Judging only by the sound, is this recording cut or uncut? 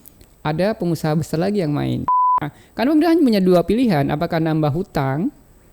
cut